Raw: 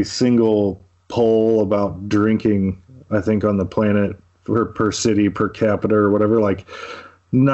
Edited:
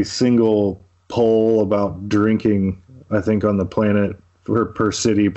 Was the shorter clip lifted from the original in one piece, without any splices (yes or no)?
yes